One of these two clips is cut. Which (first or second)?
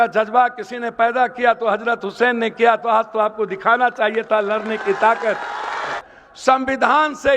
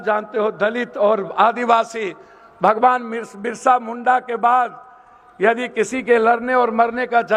first